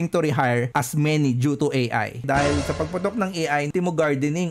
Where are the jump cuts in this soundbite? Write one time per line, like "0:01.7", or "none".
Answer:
0:02.2
0:03.7